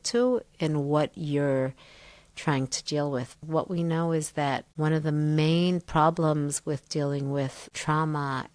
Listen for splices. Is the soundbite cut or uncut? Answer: cut